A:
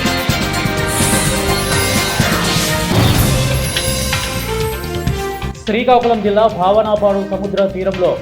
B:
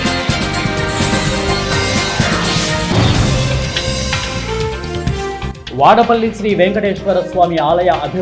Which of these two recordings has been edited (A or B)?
B